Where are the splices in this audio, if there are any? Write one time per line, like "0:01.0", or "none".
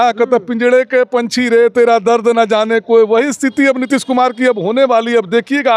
none